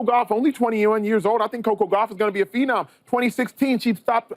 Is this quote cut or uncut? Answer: uncut